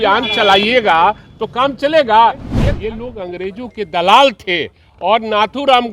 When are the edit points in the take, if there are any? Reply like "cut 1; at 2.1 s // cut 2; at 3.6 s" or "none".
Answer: cut 1; at 2.5 s